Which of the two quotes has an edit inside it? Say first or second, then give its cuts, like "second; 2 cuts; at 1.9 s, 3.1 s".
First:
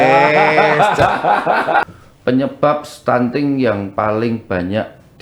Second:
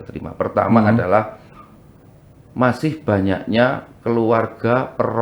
first; 1 cut; at 1.9 s